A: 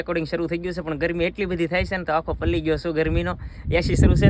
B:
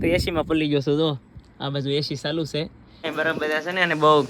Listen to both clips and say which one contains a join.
B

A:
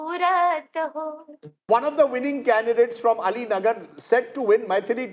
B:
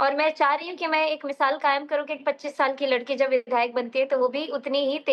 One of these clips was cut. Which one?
A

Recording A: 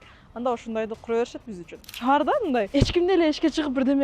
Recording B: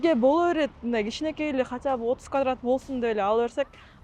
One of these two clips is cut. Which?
A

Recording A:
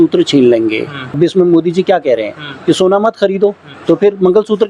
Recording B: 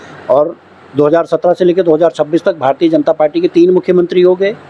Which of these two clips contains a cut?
A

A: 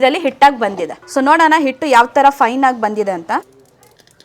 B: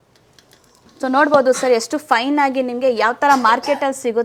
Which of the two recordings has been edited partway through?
A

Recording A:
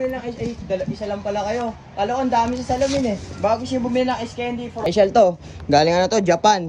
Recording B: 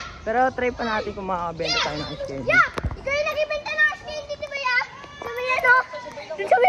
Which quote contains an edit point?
A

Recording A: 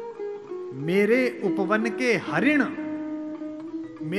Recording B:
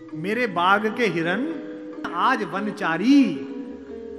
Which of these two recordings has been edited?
B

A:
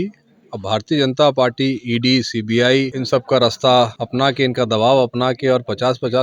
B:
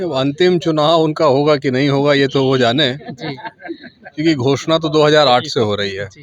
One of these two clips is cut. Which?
A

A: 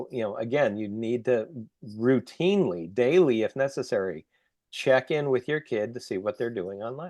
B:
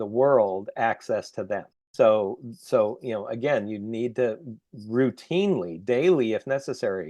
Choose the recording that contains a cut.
B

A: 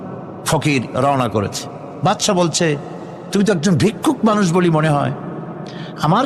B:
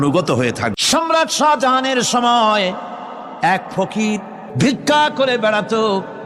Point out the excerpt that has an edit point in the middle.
B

